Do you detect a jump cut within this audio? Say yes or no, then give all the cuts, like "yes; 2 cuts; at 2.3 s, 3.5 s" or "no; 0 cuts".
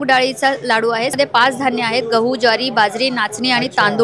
yes; 1 cut; at 1.1 s